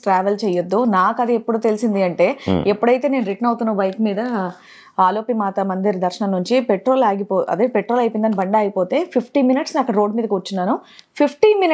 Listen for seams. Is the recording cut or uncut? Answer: uncut